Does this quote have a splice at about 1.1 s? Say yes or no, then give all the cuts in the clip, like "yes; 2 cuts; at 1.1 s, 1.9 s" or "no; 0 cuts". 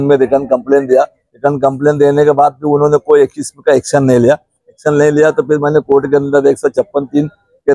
no; 0 cuts